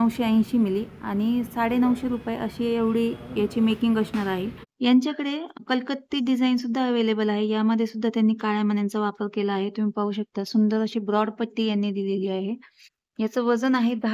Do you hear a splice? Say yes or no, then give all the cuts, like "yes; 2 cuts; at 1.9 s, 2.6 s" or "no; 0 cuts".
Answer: yes; 2 cuts; at 4.6 s, 5.6 s